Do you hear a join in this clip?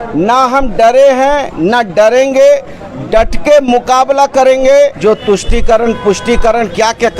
yes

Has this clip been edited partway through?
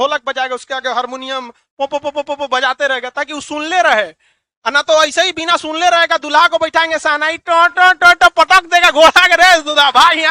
no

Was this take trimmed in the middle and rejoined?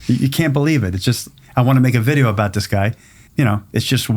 yes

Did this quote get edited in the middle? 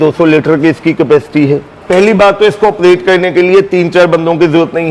yes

